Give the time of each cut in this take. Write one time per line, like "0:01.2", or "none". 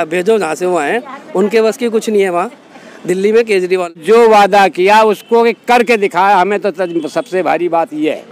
0:03.9